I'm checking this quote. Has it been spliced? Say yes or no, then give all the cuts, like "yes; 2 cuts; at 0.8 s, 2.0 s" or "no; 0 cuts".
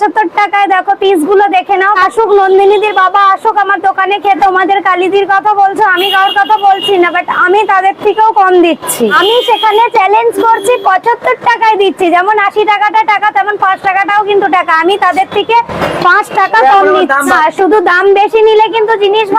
yes; 4 cuts; at 2.0 s, 4.4 s, 9.2 s, 17.4 s